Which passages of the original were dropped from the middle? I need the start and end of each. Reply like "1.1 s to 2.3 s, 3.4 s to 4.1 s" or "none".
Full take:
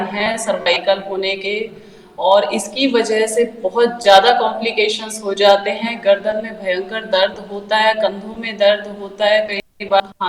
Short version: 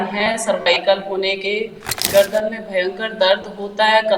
2.0 s to 5.9 s

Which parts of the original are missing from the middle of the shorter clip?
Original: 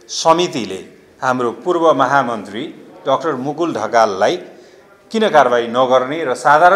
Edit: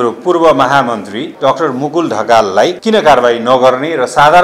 2.6 s to 2.9 s, 4.4 s to 5.1 s

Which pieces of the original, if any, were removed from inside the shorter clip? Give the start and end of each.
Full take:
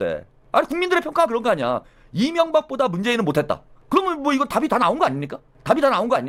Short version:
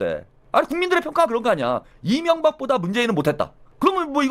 1.9 s to 2.0 s

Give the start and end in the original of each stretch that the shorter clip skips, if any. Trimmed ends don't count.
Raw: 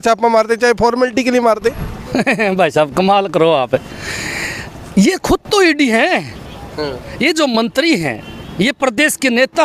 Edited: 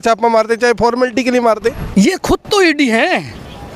1.8 s to 4.8 s

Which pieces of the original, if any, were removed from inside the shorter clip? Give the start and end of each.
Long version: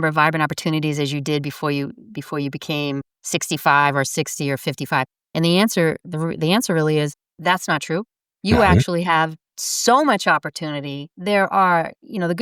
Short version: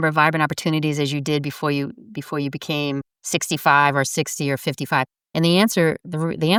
none

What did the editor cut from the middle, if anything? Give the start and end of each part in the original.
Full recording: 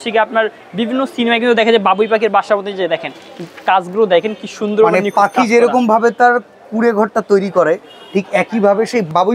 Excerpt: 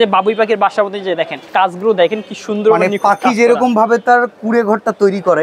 3.1 s to 3.5 s, 6.5 s to 6.7 s

